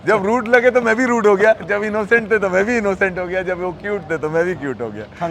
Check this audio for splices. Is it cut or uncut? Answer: uncut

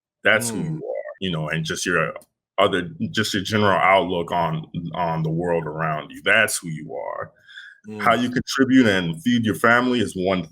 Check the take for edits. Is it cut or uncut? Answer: cut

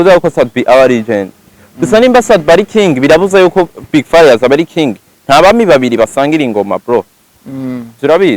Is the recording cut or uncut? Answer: uncut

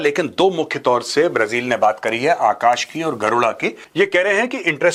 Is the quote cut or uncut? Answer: uncut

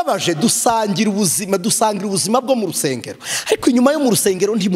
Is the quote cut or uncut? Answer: uncut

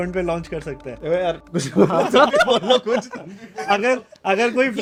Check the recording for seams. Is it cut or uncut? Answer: uncut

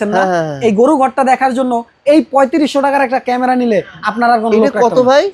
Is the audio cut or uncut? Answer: uncut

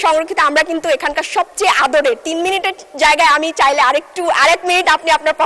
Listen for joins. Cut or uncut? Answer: uncut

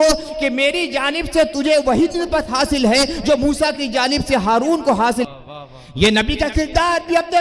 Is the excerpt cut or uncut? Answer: cut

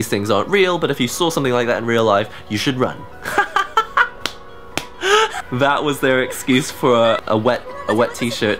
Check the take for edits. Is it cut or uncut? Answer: cut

